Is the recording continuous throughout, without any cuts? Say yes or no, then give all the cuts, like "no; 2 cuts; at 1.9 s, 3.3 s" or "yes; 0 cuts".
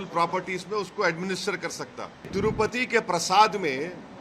no; 1 cut; at 2.3 s